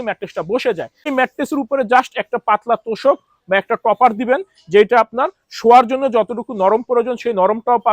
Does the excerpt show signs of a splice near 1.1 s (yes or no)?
yes